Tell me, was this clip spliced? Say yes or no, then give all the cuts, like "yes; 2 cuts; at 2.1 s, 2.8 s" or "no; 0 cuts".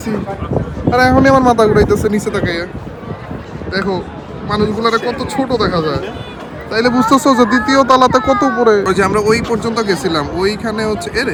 no; 0 cuts